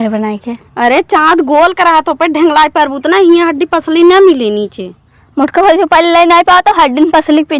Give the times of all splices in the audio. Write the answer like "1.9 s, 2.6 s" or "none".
none